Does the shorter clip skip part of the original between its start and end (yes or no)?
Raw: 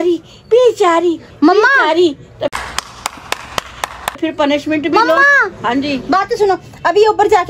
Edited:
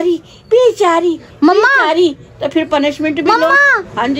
yes